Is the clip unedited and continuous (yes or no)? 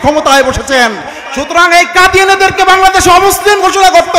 yes